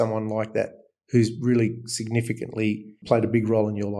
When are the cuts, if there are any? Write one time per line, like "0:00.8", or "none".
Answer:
0:03.0